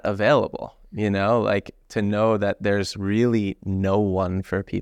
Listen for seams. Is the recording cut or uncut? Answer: uncut